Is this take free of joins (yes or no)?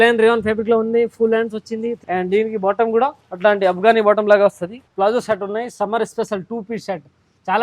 no